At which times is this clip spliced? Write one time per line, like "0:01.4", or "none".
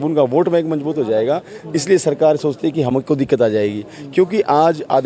none